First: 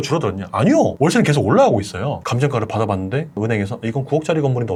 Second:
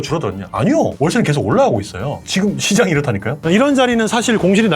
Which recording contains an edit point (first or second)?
second